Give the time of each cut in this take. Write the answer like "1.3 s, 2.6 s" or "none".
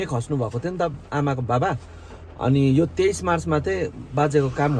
none